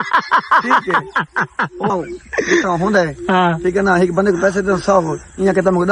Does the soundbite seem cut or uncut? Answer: cut